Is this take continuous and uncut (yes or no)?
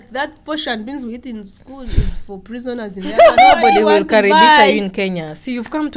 no